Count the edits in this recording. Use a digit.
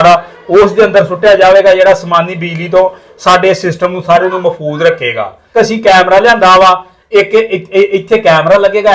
1